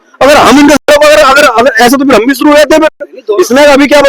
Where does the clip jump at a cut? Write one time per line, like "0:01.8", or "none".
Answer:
none